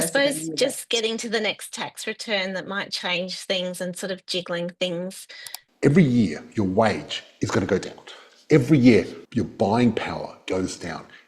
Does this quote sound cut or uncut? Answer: cut